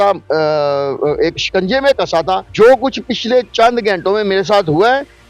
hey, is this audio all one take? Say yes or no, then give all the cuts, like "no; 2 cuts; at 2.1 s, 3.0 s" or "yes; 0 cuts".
no; 1 cut; at 2.5 s